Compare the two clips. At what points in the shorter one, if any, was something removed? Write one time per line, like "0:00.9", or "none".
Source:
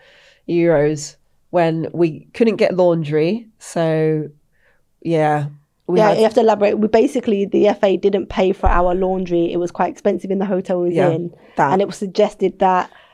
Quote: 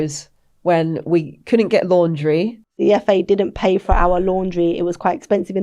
0:02.8